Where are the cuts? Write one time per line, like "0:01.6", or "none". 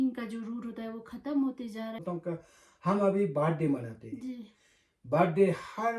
0:02.0